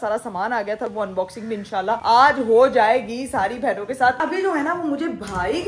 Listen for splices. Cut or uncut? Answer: cut